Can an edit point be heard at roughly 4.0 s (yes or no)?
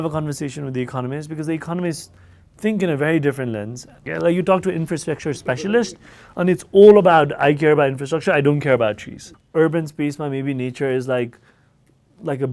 yes